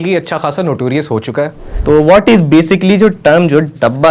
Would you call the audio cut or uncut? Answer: cut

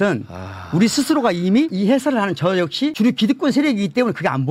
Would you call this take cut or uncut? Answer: uncut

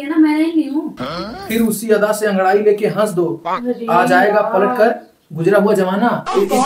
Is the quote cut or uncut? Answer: cut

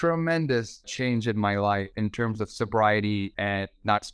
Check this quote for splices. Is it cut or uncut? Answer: cut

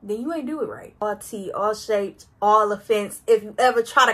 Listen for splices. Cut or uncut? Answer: cut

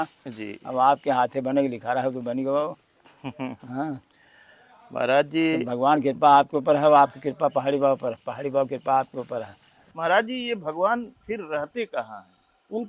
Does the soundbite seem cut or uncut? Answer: cut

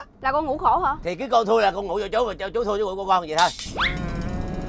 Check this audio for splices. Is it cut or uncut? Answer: cut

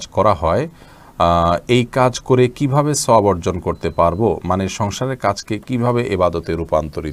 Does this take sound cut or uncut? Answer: uncut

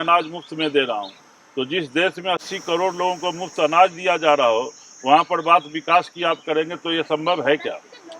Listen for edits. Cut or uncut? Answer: uncut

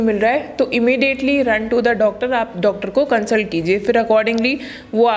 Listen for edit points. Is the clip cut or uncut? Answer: uncut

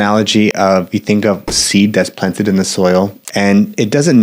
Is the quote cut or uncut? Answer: cut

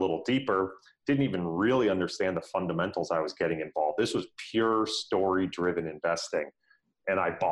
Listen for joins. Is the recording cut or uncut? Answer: uncut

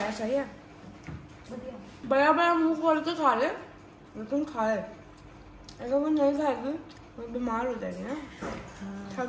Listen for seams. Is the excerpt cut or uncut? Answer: uncut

